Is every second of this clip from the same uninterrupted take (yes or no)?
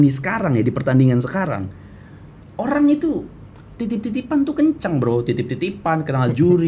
yes